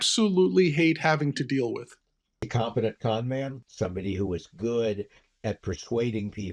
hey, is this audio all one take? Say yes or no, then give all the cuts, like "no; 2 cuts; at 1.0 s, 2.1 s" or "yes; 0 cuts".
no; 2 cuts; at 2.5 s, 3.6 s